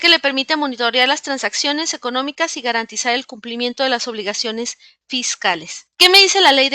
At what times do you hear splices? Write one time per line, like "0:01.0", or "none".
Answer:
0:05.8